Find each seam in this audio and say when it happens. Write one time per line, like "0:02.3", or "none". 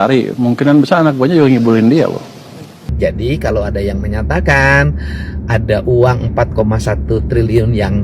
0:02.9

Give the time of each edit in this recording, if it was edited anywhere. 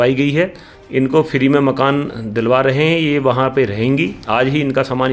none

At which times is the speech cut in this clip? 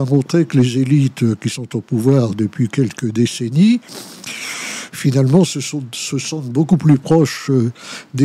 none

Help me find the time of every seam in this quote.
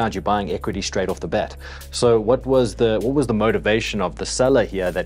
none

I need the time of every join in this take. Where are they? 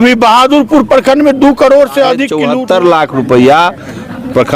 0:02.4

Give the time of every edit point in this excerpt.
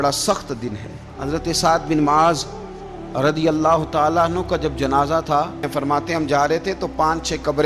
0:01.1
0:05.7

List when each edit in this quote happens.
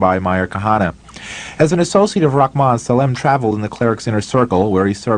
0:00.9

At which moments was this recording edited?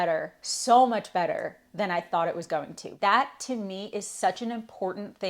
0:02.8

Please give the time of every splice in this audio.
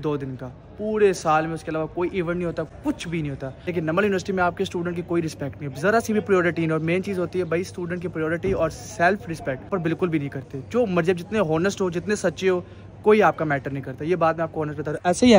0:03.1
0:09.7

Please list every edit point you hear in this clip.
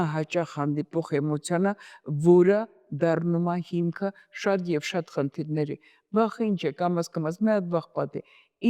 none

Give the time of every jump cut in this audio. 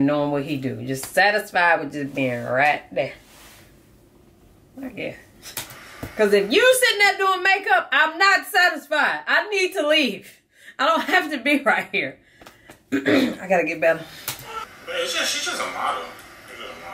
0:14.7

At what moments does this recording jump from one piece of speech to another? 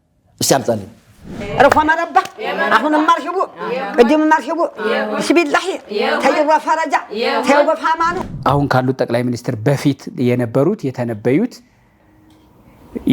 0:01.4
0:08.2

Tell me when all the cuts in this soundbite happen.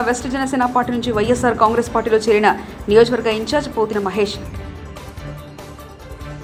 none

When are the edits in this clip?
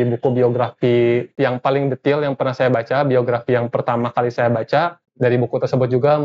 0:01.3
0:05.0

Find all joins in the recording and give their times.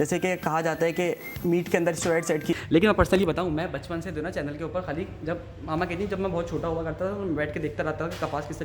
0:02.5

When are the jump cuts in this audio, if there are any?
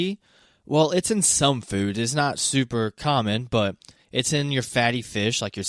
none

